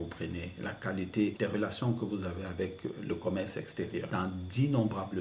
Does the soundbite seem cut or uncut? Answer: cut